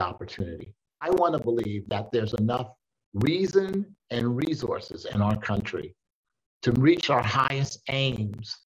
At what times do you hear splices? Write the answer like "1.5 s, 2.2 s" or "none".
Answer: 1.0 s